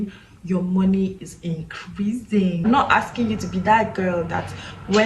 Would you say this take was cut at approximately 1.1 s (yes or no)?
no